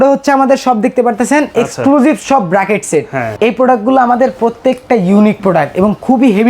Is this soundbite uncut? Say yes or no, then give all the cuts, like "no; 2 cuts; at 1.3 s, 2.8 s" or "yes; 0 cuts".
no; 1 cut; at 3.2 s